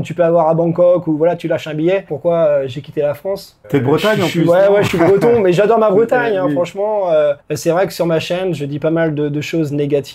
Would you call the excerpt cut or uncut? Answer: cut